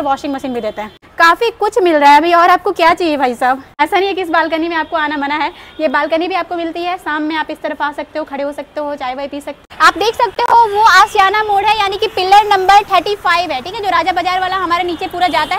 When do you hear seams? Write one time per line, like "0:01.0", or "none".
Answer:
none